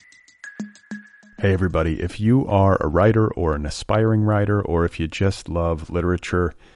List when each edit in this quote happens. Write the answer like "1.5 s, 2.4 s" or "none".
0.9 s